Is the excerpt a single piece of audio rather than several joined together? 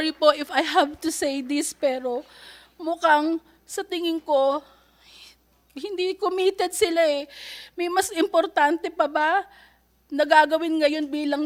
yes; 0 cuts

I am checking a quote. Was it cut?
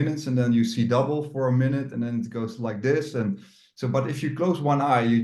no; 0 cuts

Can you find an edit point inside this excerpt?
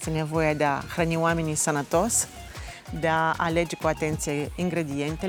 no; 0 cuts

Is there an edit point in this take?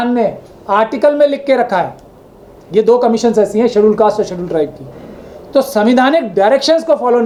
no; 0 cuts

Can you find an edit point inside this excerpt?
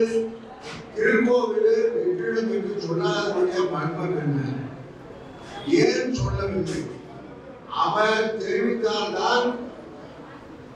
no; 0 cuts

